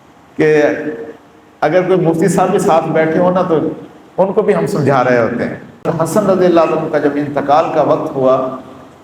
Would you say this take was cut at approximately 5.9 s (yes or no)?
yes